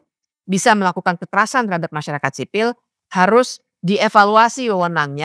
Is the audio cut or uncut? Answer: uncut